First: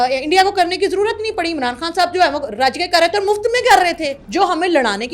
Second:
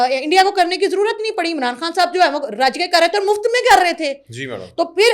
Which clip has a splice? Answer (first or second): first